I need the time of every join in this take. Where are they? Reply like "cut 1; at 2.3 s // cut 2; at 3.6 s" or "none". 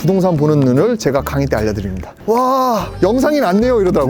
cut 1; at 2.1 s